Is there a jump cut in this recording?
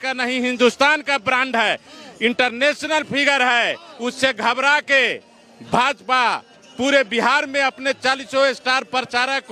no; 0 cuts

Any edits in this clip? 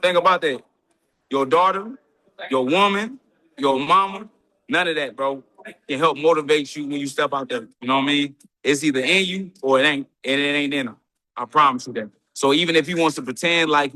no; 0 cuts

